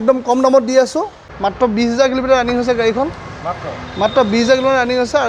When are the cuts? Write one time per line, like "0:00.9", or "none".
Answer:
0:01.3